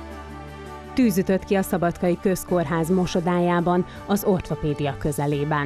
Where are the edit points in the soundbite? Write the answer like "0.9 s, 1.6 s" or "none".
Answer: 1.0 s